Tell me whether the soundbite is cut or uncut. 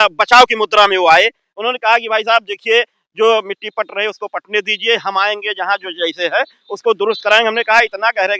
uncut